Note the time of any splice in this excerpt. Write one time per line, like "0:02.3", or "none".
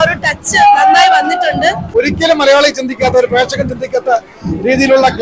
0:01.9